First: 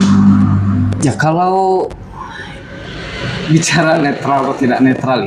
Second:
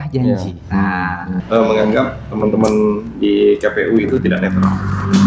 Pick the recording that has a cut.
second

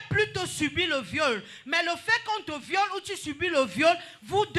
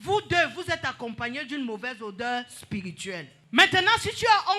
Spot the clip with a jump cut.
second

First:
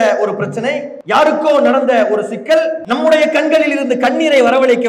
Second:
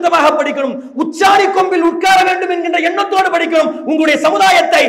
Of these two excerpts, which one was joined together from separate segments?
first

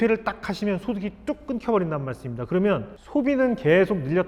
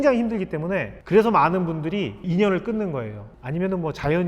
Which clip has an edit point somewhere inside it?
second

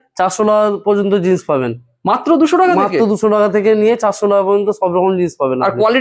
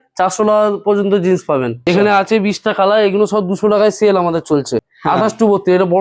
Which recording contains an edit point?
second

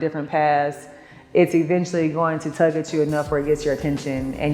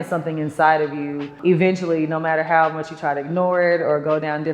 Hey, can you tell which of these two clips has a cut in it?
second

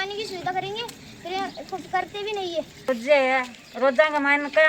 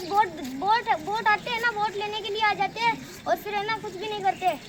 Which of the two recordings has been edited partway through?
first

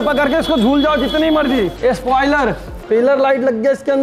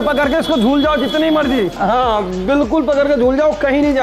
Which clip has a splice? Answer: first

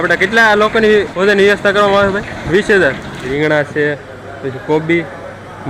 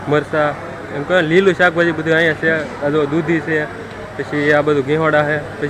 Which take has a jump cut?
first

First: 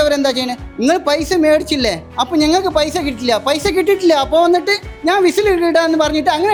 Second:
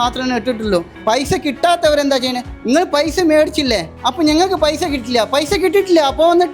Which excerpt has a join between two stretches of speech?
second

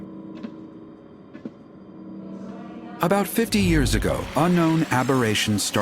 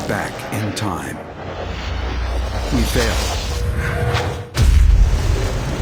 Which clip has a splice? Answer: first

